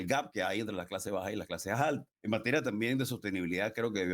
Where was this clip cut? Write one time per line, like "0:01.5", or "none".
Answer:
0:01.7